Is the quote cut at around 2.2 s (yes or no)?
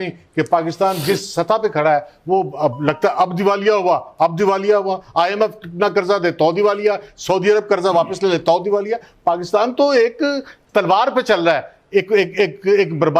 no